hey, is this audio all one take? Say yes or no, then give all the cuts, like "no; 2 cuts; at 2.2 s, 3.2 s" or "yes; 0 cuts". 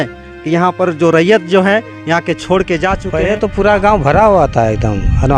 no; 1 cut; at 3.1 s